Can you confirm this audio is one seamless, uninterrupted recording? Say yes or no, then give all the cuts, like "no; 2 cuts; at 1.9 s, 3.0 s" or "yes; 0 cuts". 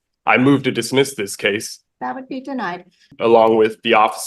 no; 2 cuts; at 1.7 s, 3.1 s